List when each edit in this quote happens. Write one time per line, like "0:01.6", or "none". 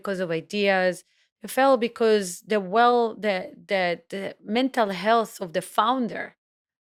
none